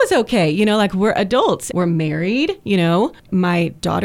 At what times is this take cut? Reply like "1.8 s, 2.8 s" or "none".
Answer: 1.6 s, 3.3 s